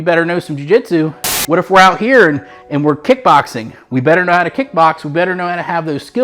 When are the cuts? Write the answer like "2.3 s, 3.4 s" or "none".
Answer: 1.3 s

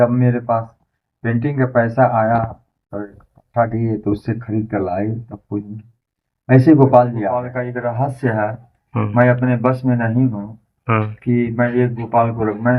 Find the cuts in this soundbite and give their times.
7.5 s

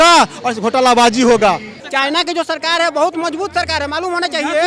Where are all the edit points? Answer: 1.8 s

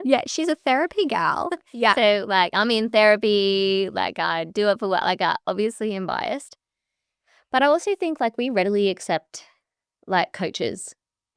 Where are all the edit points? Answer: none

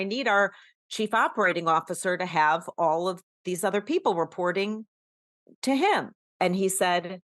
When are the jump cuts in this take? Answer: 6.2 s

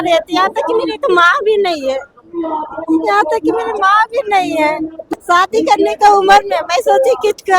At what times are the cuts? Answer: 5.0 s

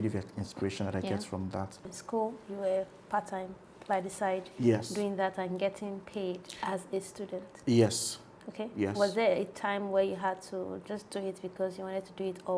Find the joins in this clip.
2.0 s

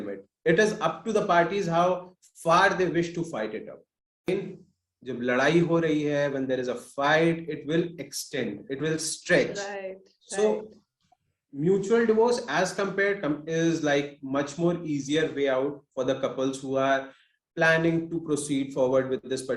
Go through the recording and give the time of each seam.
4.3 s

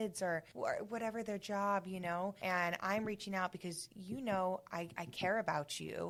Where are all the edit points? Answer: none

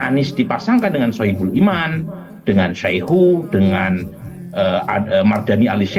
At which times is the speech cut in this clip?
none

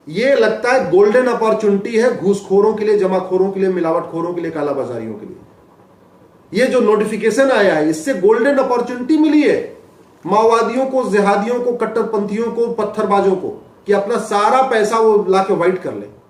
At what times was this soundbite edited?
none

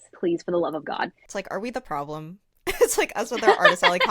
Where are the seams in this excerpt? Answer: 1.2 s

